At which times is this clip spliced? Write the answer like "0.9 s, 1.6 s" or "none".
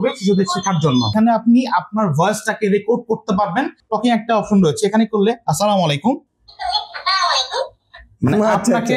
1.1 s, 3.8 s